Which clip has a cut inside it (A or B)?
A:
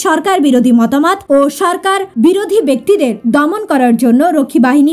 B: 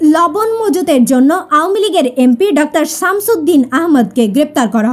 A